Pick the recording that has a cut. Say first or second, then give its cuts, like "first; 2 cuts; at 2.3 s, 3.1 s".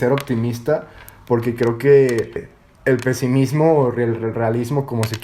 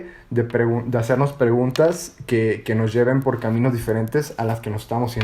first; 1 cut; at 2.4 s